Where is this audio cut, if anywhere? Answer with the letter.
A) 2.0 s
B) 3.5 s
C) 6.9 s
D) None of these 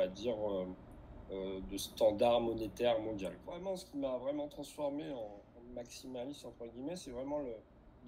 B